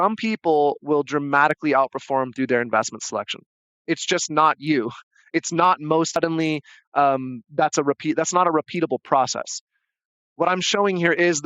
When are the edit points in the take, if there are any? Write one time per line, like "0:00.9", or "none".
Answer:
0:06.2